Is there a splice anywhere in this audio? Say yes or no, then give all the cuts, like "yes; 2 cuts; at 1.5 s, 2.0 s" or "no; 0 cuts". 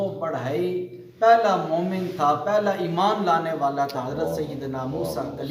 no; 0 cuts